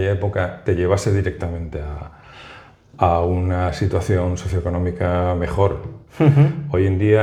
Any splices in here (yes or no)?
no